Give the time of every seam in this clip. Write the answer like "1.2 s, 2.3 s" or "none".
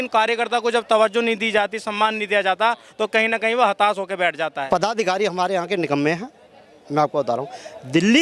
4.6 s